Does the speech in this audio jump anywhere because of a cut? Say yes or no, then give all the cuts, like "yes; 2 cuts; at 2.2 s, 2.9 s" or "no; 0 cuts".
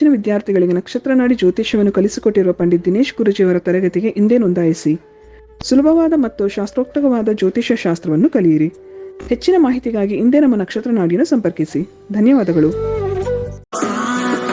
yes; 1 cut; at 13.6 s